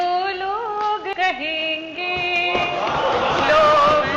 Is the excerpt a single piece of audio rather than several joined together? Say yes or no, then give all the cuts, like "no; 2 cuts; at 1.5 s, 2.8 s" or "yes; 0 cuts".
no; 1 cut; at 1.1 s